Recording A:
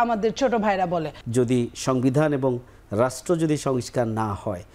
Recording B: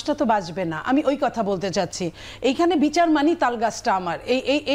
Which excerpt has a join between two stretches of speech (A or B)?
A